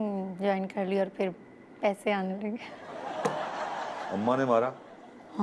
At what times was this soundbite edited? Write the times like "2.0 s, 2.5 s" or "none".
4.1 s